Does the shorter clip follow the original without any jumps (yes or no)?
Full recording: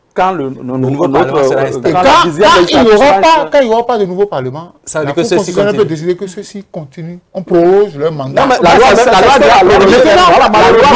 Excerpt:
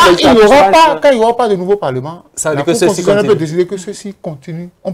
yes